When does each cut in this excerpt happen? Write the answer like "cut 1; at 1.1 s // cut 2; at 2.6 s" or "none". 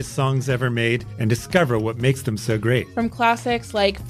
cut 1; at 1.1 s // cut 2; at 2.9 s